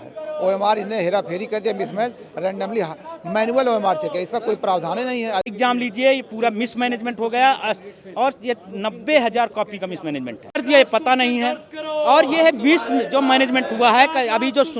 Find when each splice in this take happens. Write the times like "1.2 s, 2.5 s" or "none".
5.5 s, 10.5 s